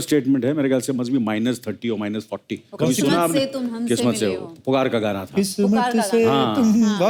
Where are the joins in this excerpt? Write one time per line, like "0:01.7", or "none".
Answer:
none